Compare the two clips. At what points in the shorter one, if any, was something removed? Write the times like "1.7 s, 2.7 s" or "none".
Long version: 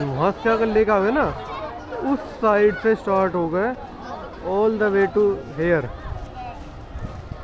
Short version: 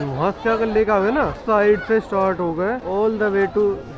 1.4 s, 2.8 s